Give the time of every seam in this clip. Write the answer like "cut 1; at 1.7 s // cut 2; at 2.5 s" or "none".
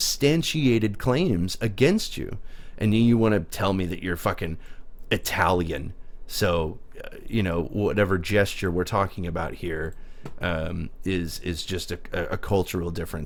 none